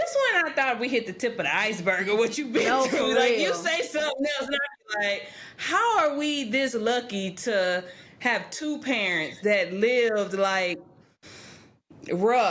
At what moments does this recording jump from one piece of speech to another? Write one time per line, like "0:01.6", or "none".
none